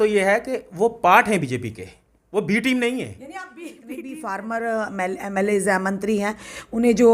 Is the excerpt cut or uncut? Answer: cut